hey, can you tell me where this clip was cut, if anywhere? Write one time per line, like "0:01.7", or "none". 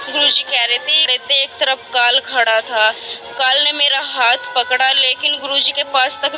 0:01.2